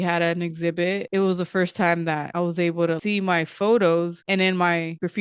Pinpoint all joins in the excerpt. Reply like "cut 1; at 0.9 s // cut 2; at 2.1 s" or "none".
cut 1; at 1.0 s // cut 2; at 3.0 s // cut 3; at 4.2 s

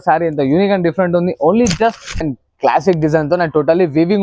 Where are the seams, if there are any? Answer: cut 1; at 2.4 s

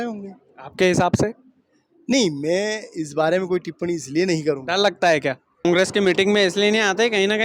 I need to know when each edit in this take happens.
cut 1; at 5.6 s

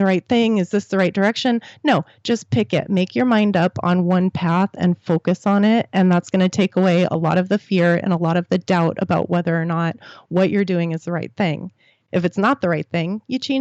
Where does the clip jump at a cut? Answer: none

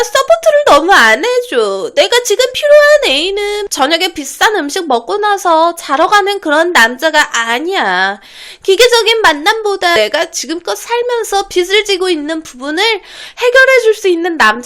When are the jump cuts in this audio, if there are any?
cut 1; at 3.6 s // cut 2; at 9.9 s

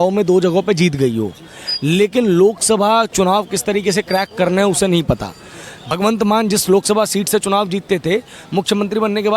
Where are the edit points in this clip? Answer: cut 1; at 5.8 s

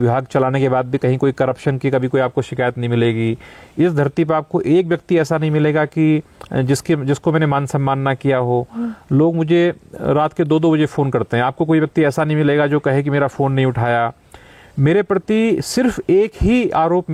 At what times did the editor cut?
none

